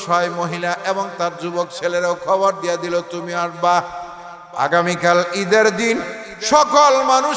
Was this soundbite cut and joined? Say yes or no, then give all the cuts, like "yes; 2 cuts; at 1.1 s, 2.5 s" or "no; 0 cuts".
no; 0 cuts